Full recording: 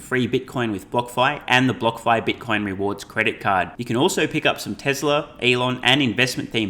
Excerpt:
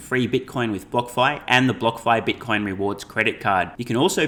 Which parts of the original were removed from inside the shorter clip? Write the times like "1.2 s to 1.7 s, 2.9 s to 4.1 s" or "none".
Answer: none